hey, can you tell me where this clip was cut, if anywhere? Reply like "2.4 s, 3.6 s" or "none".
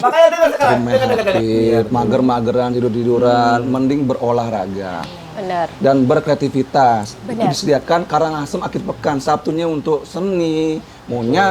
1.4 s